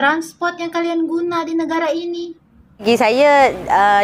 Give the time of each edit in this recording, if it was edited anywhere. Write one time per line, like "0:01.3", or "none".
0:02.8